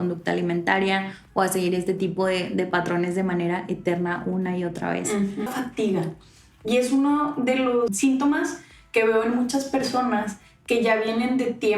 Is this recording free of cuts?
no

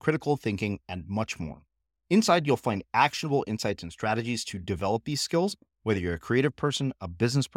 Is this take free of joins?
yes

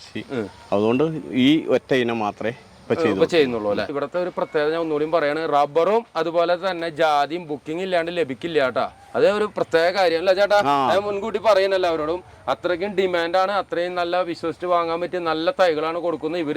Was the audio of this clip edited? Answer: yes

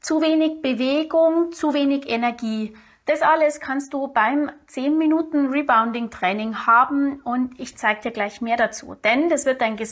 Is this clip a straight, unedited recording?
yes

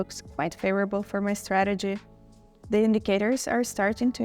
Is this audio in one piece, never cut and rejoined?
yes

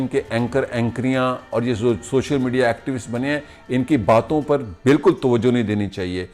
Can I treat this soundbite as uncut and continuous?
yes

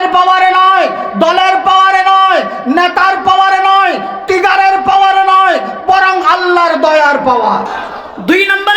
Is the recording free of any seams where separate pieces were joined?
no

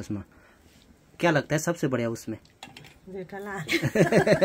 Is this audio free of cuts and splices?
yes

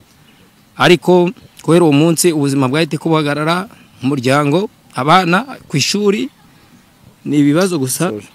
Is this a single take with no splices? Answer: yes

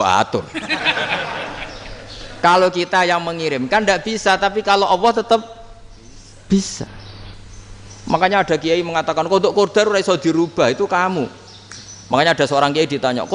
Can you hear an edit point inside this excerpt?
no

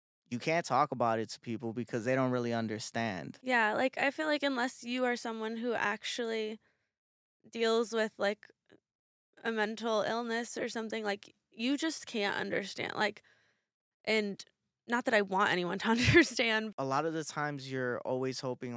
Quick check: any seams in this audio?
yes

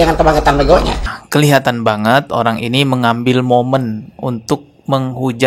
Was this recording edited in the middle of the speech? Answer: yes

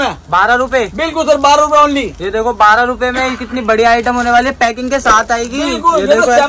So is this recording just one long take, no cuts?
yes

